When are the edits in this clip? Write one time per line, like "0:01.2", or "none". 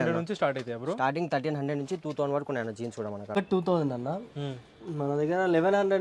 0:03.3